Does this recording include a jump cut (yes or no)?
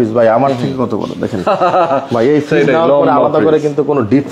no